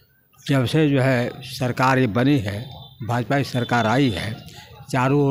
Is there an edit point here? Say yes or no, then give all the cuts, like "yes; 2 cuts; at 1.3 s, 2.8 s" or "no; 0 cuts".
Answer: no; 0 cuts